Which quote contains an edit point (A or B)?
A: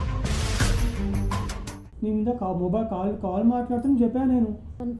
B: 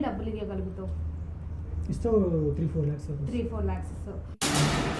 A